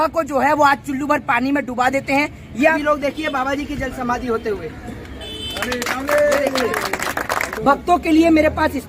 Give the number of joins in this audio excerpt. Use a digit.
2